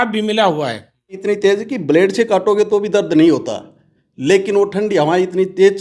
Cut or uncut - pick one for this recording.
cut